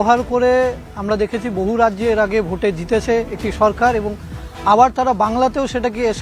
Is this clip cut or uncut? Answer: uncut